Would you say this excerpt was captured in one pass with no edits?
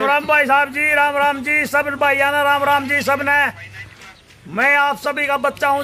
yes; 0 cuts

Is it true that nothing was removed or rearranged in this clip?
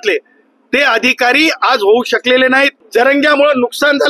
no; 1 cut; at 2.8 s

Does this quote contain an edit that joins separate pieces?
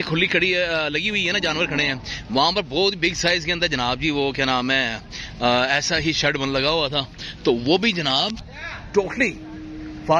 no; 0 cuts

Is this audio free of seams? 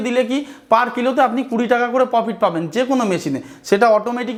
yes; 0 cuts

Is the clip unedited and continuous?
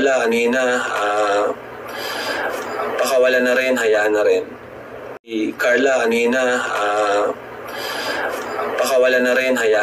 no; 1 cut; at 5.3 s

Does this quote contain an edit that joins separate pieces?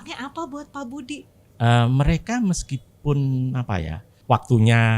yes; 2 cuts; at 1.4 s, 4.1 s

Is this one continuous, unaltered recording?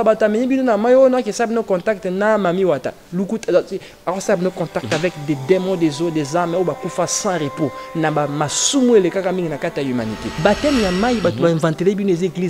no; 1 cut; at 10.2 s

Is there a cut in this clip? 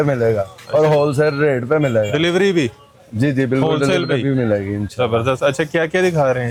no; 0 cuts

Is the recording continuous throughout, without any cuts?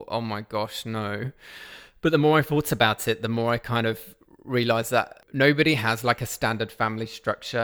no; 1 cut; at 5.2 s

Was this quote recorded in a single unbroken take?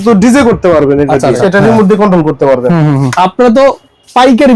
no; 2 cuts; at 1.4 s, 3.1 s

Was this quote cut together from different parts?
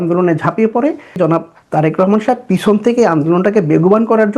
yes; 1 cut; at 1.2 s

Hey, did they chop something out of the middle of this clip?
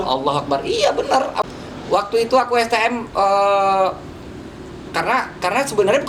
yes; 1 cut; at 1.4 s

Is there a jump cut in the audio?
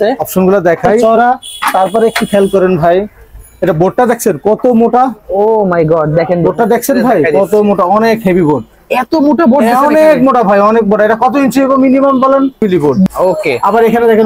yes; 2 cuts; at 1.0 s, 12.5 s

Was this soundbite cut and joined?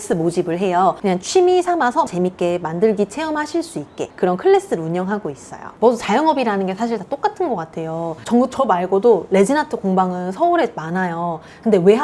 yes; 3 cuts; at 1.0 s, 2.1 s, 5.6 s

